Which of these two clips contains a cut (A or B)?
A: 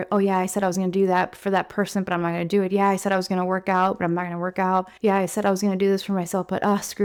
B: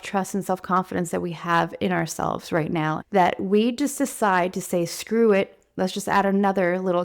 B